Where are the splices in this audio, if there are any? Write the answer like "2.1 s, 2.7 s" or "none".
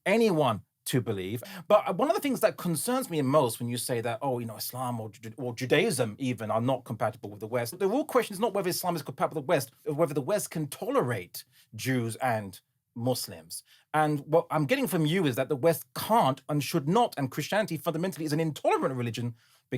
1.4 s, 7.8 s, 9.8 s